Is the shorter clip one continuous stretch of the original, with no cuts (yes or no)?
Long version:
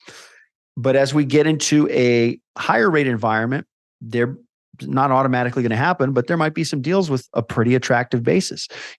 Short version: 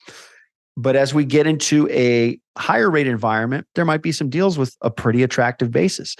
no